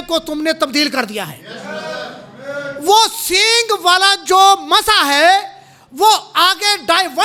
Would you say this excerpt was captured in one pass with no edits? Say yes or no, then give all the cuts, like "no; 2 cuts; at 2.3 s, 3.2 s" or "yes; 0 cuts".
yes; 0 cuts